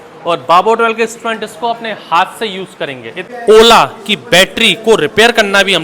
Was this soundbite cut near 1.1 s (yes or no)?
no